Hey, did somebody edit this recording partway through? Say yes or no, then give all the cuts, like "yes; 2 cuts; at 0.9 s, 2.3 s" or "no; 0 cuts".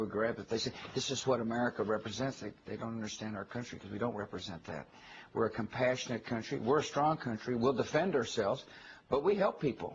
yes; 1 cut; at 2.1 s